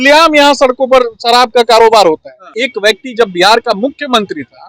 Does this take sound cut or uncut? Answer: cut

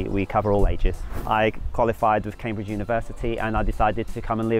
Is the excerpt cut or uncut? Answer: cut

